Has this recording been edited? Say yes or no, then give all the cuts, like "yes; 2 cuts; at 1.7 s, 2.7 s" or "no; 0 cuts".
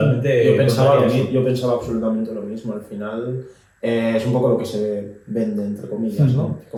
no; 0 cuts